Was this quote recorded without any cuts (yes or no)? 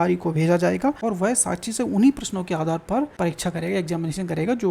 no